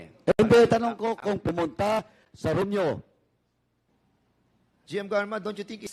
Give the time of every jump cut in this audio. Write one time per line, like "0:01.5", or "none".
0:03.9